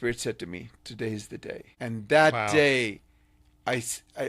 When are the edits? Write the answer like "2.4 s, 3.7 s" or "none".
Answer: 1.7 s